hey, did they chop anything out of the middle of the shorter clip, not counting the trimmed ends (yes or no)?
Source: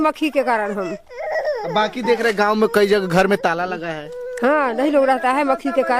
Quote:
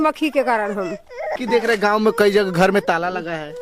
yes